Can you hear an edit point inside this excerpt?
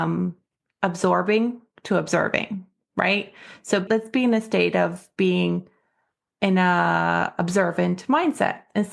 yes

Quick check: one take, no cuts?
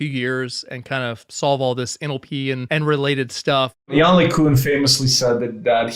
no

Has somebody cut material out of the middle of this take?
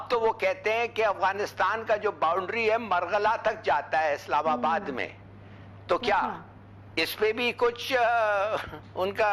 no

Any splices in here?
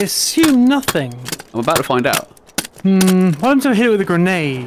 yes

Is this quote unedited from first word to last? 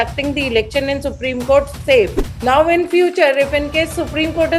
no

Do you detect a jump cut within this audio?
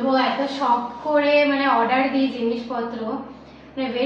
no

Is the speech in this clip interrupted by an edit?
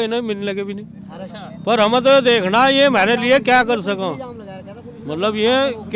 no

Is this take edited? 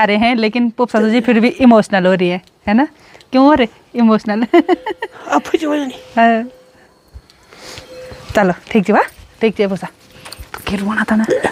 no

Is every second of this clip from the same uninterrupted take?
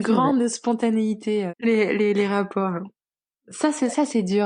no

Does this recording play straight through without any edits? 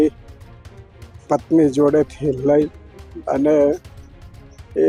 yes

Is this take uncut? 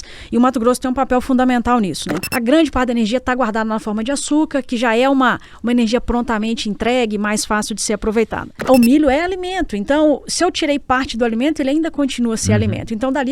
no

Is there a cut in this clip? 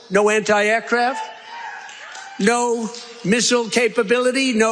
no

